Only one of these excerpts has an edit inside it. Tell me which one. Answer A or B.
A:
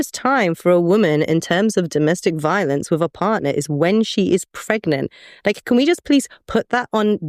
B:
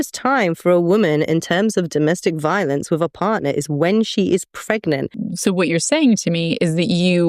B